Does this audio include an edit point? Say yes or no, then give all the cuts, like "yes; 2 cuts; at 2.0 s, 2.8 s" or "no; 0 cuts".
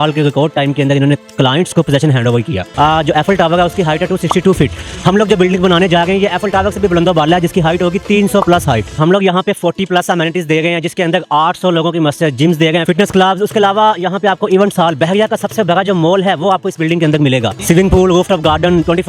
yes; 4 cuts; at 2.7 s, 9.0 s, 12.8 s, 17.5 s